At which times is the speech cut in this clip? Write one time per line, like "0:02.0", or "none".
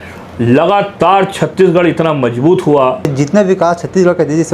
0:03.1